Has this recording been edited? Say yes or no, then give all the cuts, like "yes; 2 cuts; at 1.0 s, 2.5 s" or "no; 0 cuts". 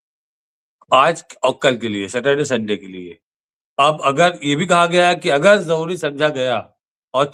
no; 0 cuts